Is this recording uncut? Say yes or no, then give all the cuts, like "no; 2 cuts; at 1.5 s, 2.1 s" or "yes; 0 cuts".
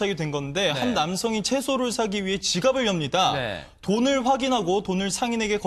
no; 1 cut; at 1.4 s